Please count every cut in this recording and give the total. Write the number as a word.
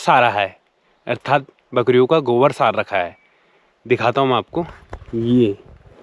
zero